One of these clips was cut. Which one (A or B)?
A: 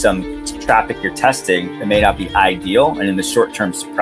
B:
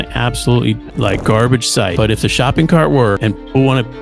B